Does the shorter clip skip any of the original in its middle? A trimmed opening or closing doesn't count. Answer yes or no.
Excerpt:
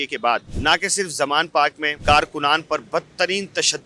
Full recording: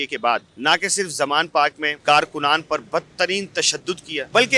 no